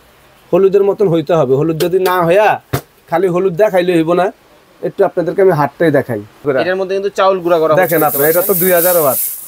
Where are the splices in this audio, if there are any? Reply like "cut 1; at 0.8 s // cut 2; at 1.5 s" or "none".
cut 1; at 6.4 s